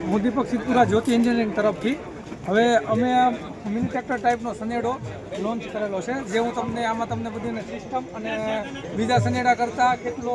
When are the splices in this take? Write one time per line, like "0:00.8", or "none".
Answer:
none